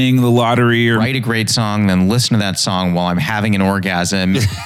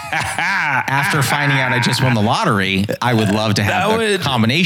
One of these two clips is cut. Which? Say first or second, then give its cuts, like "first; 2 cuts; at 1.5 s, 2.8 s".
first; 1 cut; at 1.0 s